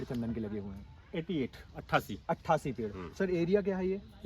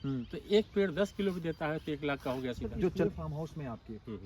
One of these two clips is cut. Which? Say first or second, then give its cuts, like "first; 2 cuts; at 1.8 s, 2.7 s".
second; 1 cut; at 3.0 s